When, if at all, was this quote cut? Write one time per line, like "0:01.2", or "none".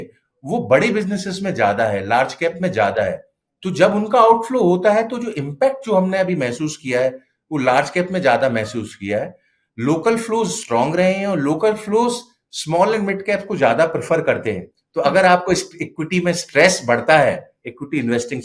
0:14.7